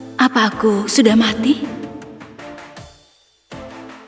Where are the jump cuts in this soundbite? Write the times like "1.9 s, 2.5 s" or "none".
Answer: 2.1 s